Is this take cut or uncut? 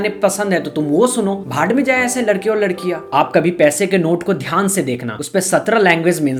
uncut